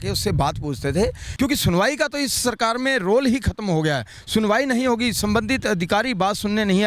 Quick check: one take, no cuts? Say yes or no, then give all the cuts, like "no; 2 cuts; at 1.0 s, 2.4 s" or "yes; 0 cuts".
no; 1 cut; at 1.2 s